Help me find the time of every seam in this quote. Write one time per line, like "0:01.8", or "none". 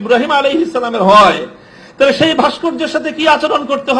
none